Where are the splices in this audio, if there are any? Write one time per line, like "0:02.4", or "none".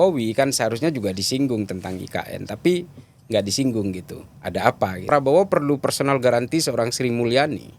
0:05.1

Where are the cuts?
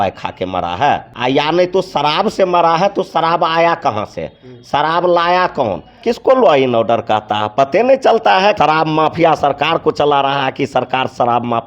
0:01.1
0:06.0
0:08.5

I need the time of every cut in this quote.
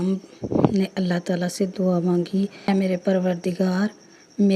0:02.7

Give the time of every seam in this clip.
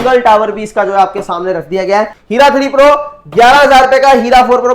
0:02.2

